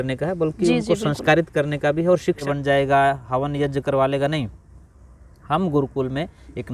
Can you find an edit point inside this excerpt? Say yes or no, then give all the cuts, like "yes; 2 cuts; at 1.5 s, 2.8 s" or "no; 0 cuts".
yes; 1 cut; at 2.4 s